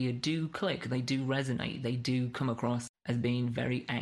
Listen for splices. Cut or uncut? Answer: cut